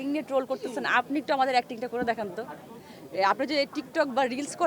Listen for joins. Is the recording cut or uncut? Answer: uncut